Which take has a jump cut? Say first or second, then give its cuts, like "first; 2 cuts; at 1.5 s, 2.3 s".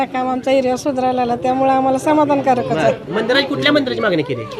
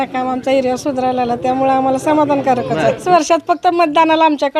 second; 1 cut; at 3.0 s